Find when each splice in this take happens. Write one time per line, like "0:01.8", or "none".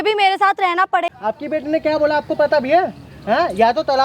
0:01.1